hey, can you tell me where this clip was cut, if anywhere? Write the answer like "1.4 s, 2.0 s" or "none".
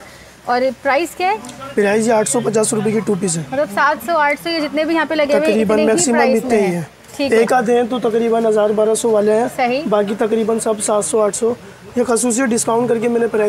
none